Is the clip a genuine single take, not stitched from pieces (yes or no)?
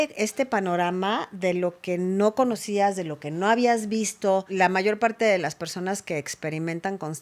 no